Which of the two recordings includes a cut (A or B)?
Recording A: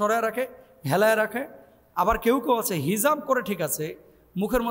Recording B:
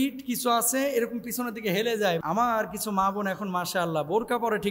B